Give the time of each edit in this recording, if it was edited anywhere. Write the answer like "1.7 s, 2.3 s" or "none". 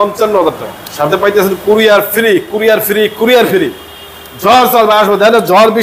none